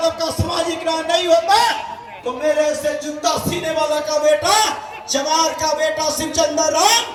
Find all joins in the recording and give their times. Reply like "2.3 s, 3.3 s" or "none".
none